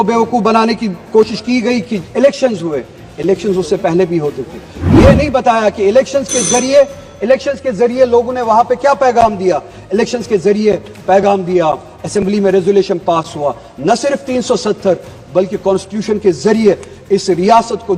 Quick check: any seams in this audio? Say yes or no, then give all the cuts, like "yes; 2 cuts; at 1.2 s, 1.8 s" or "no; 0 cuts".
no; 0 cuts